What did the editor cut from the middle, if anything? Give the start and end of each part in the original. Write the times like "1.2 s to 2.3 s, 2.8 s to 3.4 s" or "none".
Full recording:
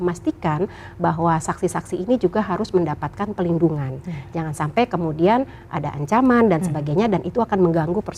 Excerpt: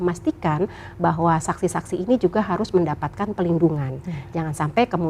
none